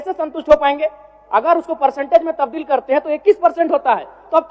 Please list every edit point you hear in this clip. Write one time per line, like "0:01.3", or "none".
none